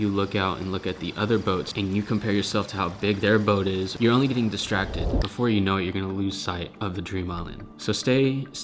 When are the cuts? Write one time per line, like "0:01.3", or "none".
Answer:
0:01.7
0:05.1